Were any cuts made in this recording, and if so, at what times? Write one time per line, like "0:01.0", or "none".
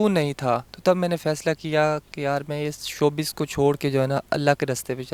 none